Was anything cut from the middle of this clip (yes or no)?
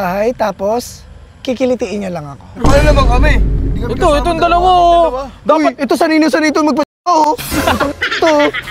no